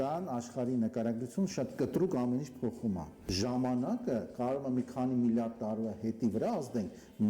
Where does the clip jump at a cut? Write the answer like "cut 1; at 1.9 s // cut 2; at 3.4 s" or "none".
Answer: cut 1; at 3.2 s